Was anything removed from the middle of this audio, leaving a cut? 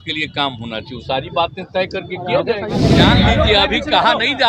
yes; 1 cut; at 2.9 s

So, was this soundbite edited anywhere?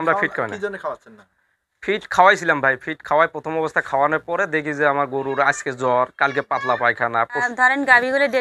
yes; 1 cut; at 7.5 s

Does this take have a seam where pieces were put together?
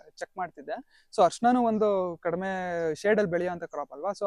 no; 0 cuts

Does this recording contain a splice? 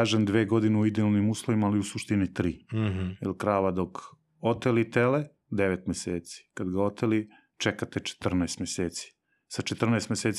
no; 0 cuts

